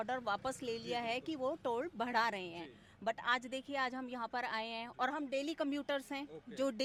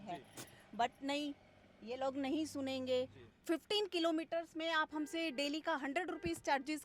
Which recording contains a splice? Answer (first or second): second